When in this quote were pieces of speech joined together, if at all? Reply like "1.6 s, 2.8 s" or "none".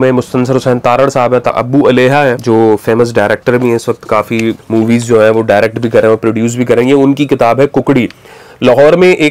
1.5 s, 2.4 s, 4.6 s